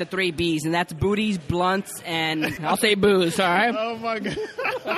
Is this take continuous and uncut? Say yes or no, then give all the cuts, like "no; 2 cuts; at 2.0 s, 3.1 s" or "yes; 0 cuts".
no; 1 cut; at 2.6 s